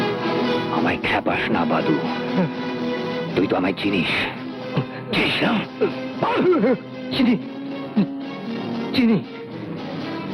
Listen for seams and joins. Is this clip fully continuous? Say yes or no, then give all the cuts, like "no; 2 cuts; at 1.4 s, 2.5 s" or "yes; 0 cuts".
yes; 0 cuts